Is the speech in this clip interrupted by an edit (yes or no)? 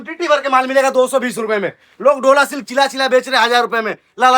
no